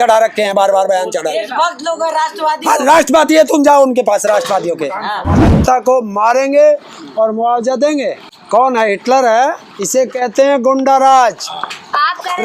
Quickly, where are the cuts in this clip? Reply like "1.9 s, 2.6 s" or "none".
5.6 s, 8.3 s, 9.7 s